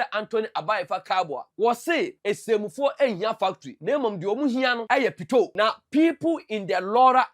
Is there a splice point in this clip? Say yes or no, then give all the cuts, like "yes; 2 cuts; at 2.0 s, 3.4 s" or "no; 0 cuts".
yes; 5 cuts; at 1.4 s, 2.2 s, 3.7 s, 4.8 s, 5.5 s